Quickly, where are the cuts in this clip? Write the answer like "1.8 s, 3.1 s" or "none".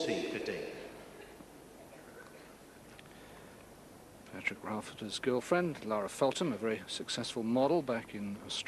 none